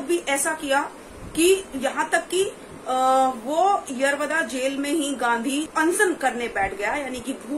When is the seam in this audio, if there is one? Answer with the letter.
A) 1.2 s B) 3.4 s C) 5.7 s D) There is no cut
C